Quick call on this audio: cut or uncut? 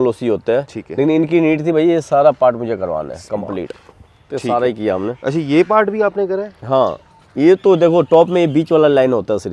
uncut